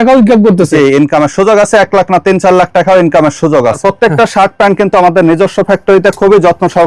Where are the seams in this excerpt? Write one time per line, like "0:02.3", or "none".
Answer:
0:03.8